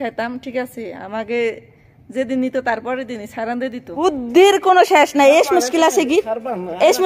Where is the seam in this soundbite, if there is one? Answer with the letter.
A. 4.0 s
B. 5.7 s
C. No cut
A